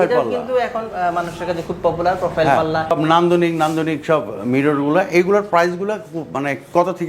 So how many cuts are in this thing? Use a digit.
1